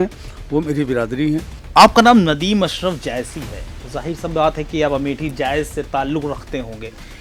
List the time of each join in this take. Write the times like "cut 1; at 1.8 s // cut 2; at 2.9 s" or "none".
cut 1; at 1.6 s